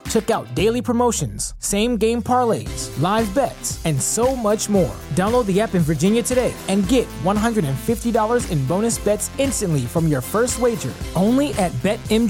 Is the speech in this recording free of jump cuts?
yes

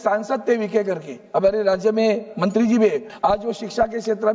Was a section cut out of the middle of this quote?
yes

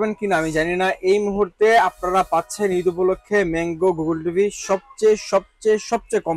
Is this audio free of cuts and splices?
yes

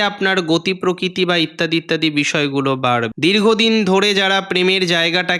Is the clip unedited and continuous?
no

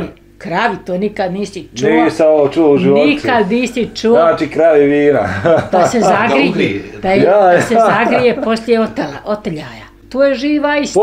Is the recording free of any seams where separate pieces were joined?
no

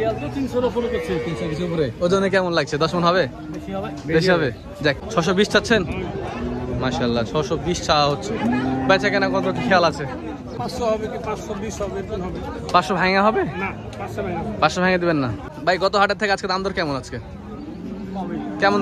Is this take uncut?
no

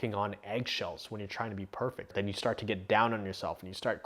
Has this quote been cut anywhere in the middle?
yes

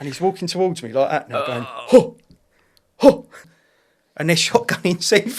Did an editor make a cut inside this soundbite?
yes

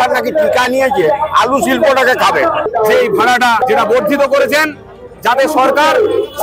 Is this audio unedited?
no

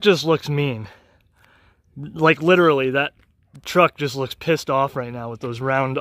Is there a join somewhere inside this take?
no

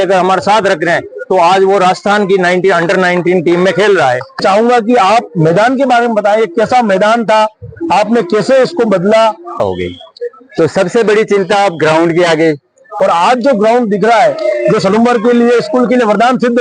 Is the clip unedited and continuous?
no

